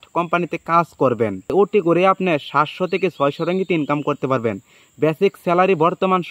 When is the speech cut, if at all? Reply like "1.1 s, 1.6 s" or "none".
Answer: 1.5 s